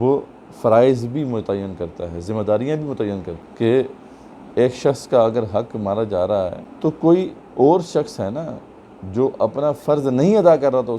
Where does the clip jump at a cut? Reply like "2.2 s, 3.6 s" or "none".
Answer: 3.4 s, 6.6 s